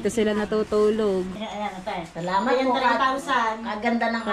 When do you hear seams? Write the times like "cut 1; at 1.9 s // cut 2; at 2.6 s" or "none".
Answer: cut 1; at 1.4 s

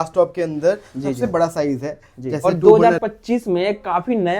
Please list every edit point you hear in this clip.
cut 1; at 2.4 s

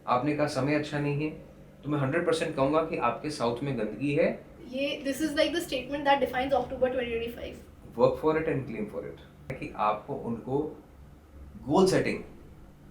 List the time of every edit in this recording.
cut 1; at 4.6 s // cut 2; at 9.6 s

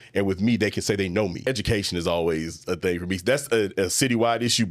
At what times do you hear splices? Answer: cut 1; at 1.4 s

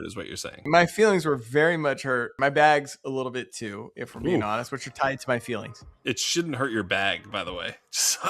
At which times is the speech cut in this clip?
cut 1; at 2.3 s

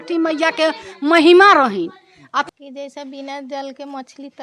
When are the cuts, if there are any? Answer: cut 1; at 2.5 s

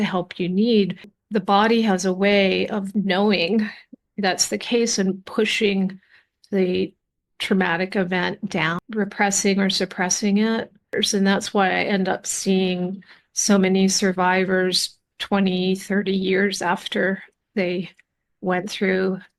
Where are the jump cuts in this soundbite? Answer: cut 1; at 1.1 s // cut 2; at 11.0 s

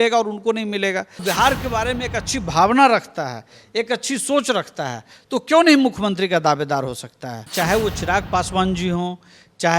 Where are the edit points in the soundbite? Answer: cut 1; at 1.2 s // cut 2; at 7.5 s

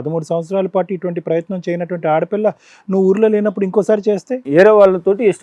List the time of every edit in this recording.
cut 1; at 4.4 s

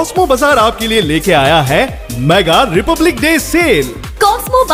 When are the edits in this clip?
none

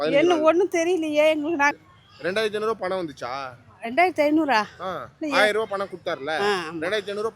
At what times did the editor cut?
cut 1; at 1.8 s

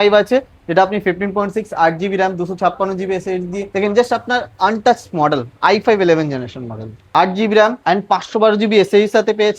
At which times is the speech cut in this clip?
cut 1; at 3.6 s

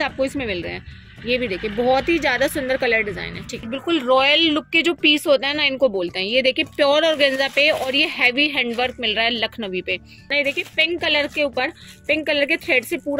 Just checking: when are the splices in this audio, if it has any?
cut 1; at 3.7 s // cut 2; at 10.3 s

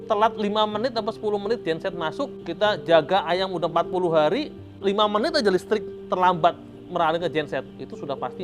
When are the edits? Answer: cut 1; at 2.4 s // cut 2; at 4.7 s

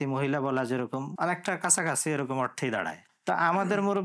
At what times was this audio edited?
cut 1; at 1.1 s // cut 2; at 3.0 s

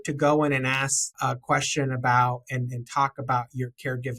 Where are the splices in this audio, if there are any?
cut 1; at 1.1 s

